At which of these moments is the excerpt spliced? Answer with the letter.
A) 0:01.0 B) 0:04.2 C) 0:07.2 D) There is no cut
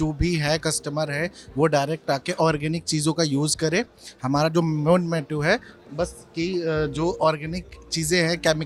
D